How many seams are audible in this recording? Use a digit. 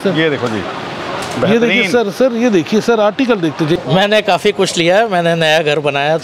1